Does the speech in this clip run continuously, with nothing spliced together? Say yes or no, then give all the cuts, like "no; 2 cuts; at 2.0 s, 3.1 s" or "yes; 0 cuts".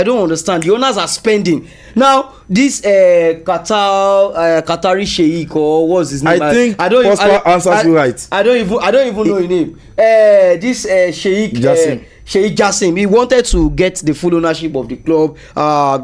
yes; 0 cuts